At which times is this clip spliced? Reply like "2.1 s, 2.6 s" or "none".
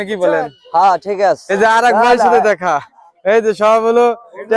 1.5 s